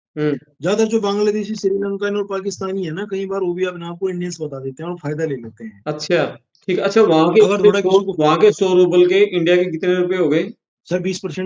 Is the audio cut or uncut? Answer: cut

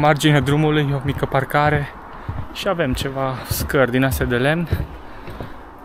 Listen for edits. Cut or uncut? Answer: uncut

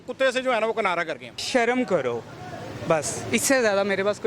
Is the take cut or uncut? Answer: cut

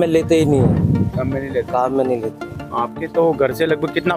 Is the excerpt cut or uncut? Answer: uncut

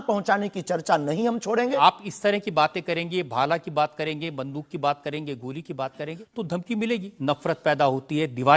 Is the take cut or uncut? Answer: cut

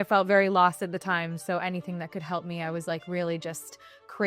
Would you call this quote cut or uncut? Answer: uncut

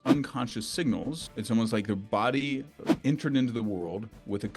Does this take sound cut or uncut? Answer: cut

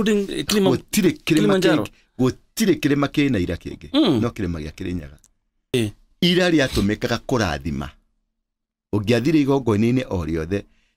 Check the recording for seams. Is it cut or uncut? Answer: cut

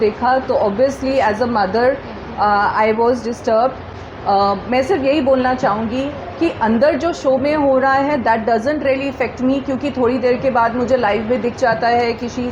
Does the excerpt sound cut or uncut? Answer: uncut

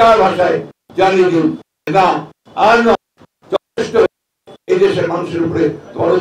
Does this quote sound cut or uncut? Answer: uncut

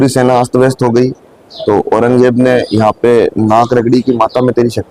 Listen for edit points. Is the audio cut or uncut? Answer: uncut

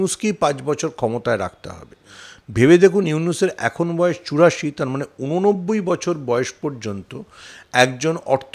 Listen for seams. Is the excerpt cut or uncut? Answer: uncut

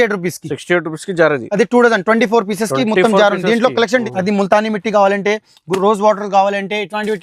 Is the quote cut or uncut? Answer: cut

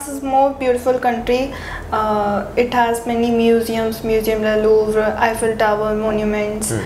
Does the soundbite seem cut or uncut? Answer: uncut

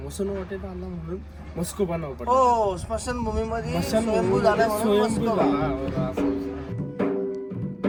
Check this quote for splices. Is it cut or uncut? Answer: uncut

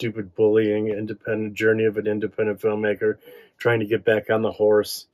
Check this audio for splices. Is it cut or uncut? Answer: uncut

